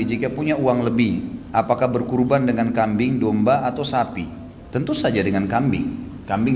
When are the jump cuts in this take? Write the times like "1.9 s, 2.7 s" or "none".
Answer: none

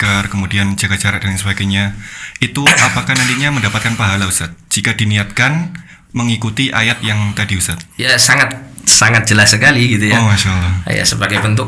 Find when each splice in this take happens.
none

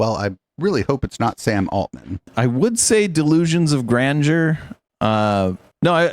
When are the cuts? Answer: 2.3 s

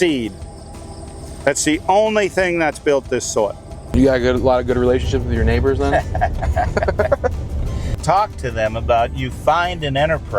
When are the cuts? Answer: 3.8 s, 7.9 s

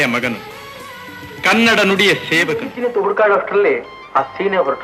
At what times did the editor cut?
2.7 s

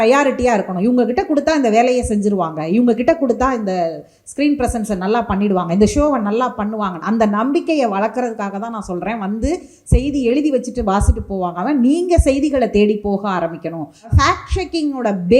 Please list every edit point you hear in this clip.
14.1 s

